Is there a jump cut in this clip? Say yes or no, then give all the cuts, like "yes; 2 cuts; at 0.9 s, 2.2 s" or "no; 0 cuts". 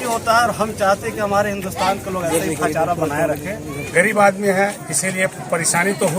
yes; 1 cut; at 3.8 s